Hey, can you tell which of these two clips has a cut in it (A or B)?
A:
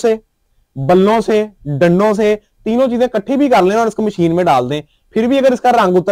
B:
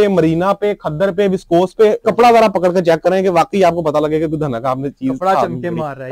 B